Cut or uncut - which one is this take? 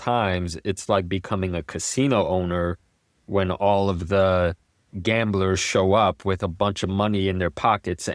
uncut